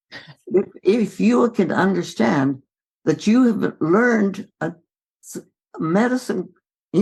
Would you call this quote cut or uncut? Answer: uncut